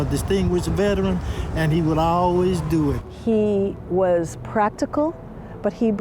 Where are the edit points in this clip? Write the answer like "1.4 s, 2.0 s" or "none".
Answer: 3.0 s